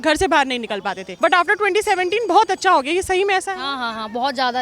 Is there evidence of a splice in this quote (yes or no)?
yes